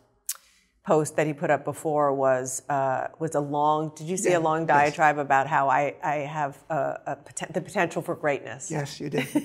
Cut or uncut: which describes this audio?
uncut